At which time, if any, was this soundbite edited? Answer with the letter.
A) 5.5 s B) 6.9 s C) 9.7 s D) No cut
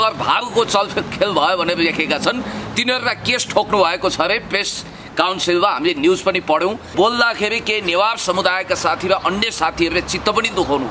B